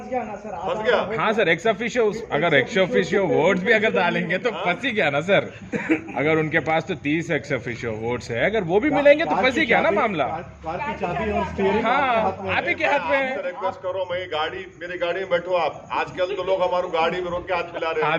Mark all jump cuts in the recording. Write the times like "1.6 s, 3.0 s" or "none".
none